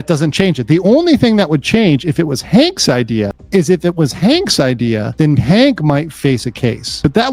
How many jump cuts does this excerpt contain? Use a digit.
0